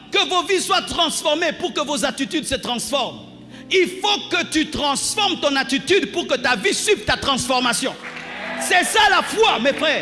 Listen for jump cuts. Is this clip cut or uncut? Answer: uncut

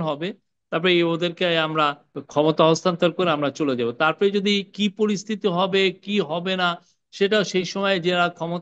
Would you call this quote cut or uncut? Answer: cut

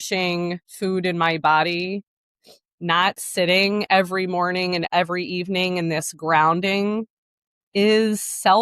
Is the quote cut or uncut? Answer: cut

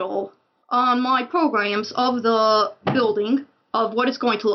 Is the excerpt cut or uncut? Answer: cut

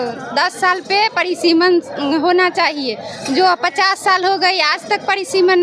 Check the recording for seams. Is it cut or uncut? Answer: uncut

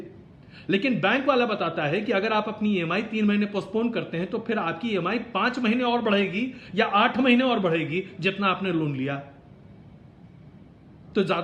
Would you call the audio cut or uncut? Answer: uncut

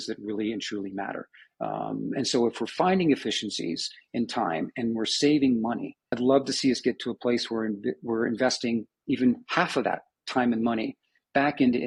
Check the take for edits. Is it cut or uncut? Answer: uncut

